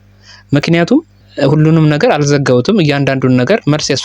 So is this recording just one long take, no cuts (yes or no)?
no